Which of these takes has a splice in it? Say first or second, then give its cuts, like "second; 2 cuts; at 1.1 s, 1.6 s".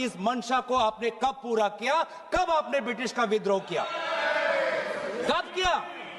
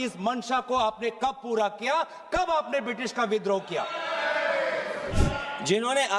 second; 1 cut; at 5.2 s